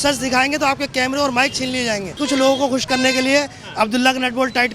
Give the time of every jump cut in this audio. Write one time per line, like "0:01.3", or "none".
0:02.2